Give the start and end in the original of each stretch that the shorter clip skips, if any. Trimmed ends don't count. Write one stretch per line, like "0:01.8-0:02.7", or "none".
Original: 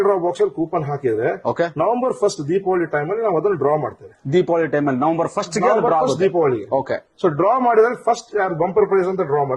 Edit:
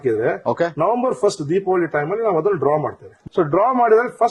0:04.1-0:07.0